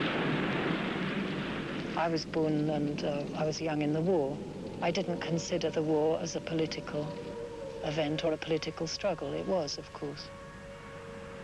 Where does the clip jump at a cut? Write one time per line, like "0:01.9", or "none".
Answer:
none